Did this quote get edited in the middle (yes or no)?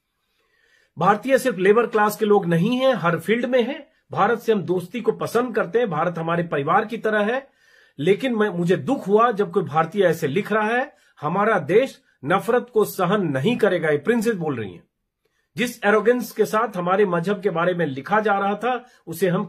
no